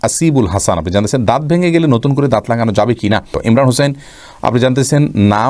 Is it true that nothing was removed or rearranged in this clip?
no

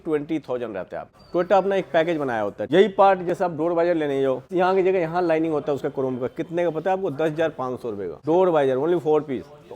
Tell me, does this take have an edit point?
yes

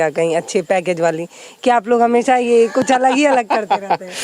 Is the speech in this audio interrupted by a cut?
no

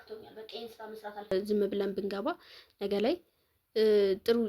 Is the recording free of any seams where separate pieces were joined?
no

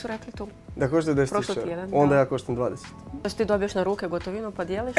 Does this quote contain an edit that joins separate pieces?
yes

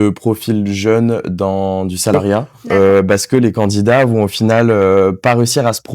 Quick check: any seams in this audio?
yes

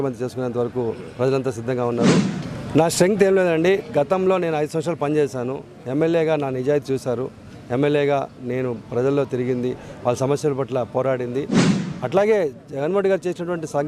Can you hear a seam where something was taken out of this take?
yes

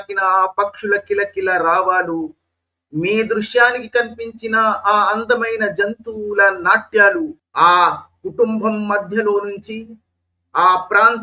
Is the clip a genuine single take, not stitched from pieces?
no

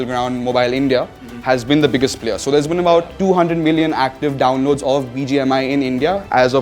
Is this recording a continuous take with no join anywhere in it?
no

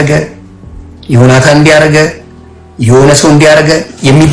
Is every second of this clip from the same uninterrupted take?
yes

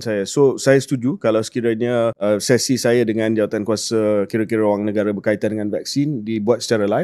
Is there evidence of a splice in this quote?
no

